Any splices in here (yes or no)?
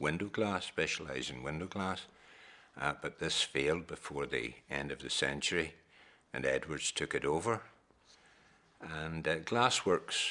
no